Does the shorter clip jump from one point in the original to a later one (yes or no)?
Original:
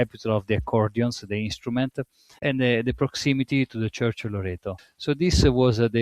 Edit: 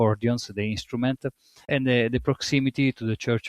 no